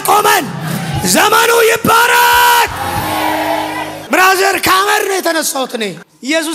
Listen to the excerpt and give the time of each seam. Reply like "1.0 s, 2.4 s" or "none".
none